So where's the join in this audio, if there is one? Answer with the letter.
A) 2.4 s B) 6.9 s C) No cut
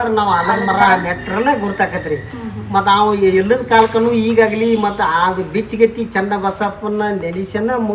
C